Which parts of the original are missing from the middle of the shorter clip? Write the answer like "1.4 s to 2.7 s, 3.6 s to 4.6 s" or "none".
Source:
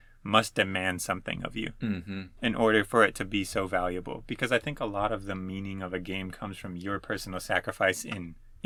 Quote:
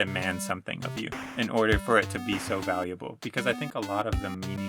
1.8 s to 2.2 s